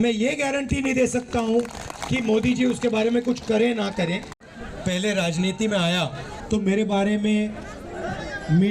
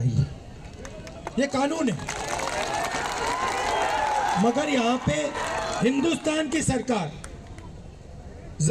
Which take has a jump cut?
first; 1 cut; at 6.3 s

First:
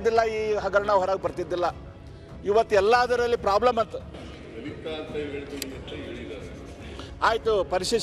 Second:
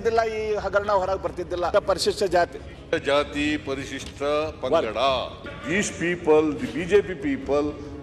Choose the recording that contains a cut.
second; 2 cuts; at 1.7 s, 5.3 s

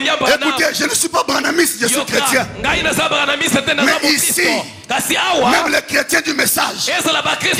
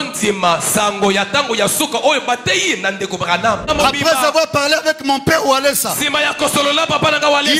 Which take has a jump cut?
second; 1 cut; at 3.6 s

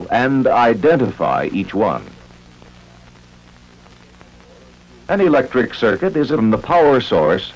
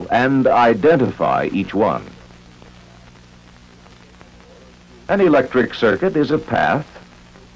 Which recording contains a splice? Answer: second; 1 cut; at 6.4 s

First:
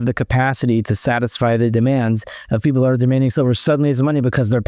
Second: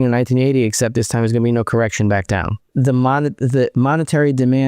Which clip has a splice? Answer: second; 1 cut; at 2.7 s

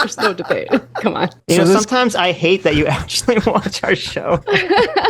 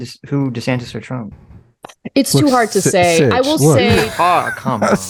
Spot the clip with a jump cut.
first; 1 cut; at 1.4 s

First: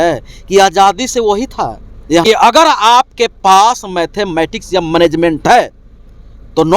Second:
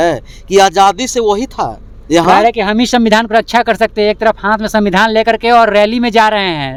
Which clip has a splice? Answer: first; 1 cut; at 2.2 s

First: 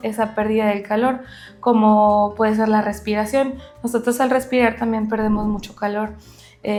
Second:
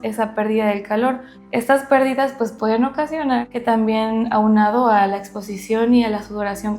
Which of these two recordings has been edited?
second; 2 cuts; at 1.3 s, 3.5 s

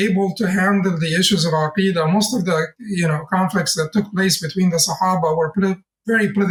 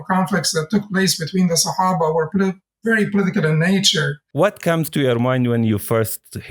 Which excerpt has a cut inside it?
second; 1 cut; at 4.2 s

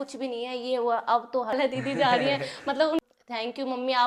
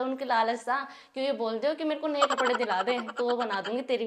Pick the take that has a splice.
first; 2 cuts; at 1.5 s, 3.0 s

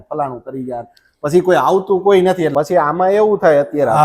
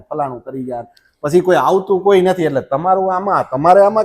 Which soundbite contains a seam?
first; 1 cut; at 2.5 s

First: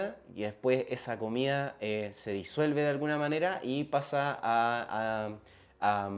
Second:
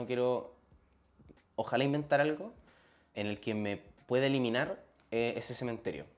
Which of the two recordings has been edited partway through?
second; 1 cut; at 3.1 s

